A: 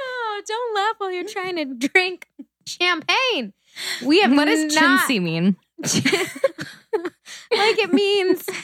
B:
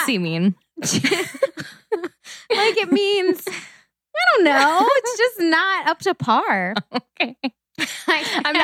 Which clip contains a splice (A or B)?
A